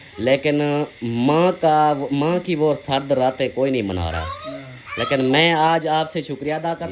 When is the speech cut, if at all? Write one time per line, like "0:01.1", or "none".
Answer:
none